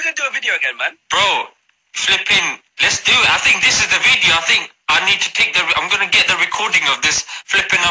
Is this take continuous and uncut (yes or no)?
yes